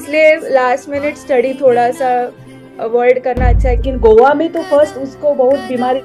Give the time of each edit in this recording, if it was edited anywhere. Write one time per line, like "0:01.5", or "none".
0:03.9